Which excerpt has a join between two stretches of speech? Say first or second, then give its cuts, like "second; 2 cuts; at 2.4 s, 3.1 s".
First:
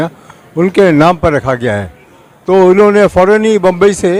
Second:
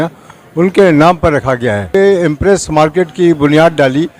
second; 1 cut; at 1.9 s